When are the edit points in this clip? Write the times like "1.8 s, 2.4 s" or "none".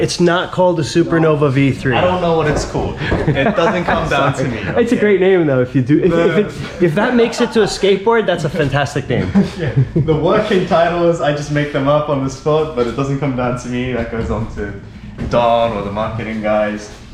none